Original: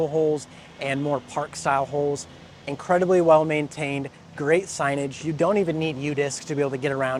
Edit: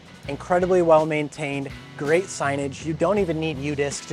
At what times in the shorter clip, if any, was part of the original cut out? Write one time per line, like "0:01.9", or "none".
none

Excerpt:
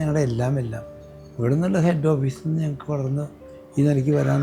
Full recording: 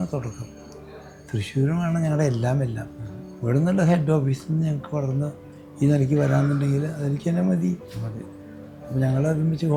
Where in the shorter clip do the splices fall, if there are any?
none

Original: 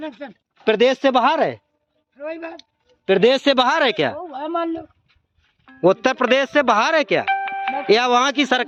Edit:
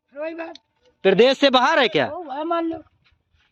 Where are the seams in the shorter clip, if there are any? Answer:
none

